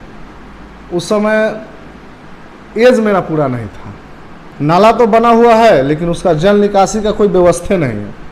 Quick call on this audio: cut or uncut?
cut